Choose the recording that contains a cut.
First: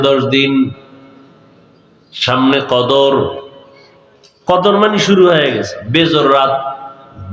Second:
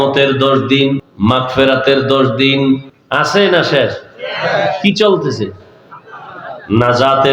second; 2 cuts; at 1.1 s, 2.9 s

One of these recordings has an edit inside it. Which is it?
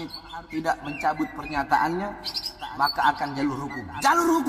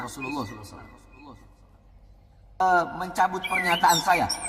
second; 1 cut; at 2.6 s

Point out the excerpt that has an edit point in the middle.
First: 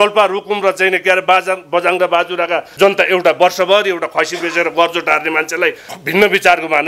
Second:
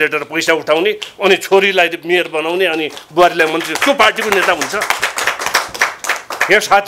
first; 2 cuts; at 2.7 s, 5.9 s

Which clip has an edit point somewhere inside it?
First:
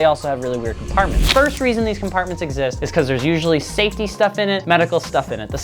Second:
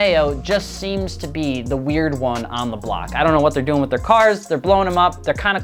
first; 1 cut; at 1.3 s

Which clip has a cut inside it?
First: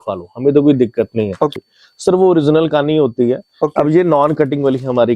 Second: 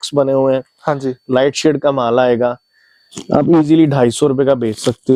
first; 1 cut; at 1.5 s

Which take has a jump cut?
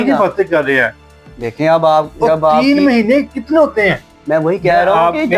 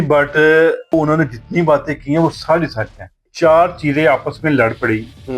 second; 2 cuts; at 0.9 s, 3.2 s

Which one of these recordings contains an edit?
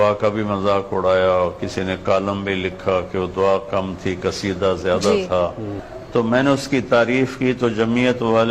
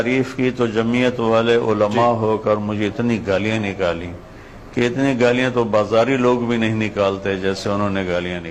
first; 1 cut; at 5.7 s

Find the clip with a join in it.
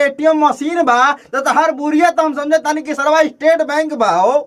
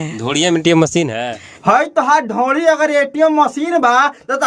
second; 1 cut; at 1.5 s

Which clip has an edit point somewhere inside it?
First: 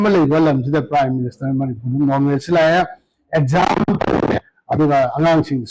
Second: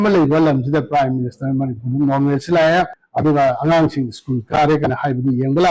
second; 1 cut; at 3.0 s

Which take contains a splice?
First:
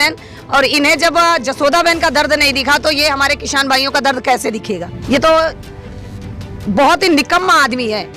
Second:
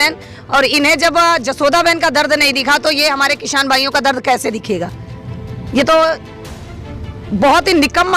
first; 1 cut; at 4.9 s

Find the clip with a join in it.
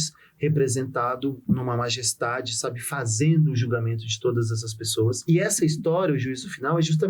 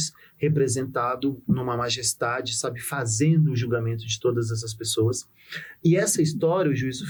first; 1 cut; at 5.2 s

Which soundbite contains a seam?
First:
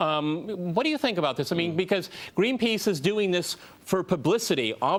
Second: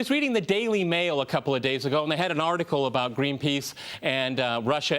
second; 1 cut; at 1.9 s

